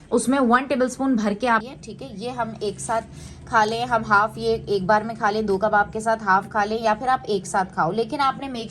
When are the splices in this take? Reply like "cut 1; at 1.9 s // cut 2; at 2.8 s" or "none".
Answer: cut 1; at 1.6 s